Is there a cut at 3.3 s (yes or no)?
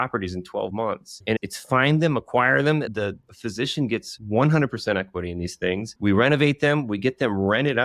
yes